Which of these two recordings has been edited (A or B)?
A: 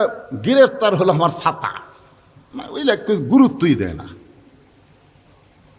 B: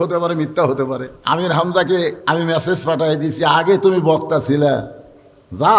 B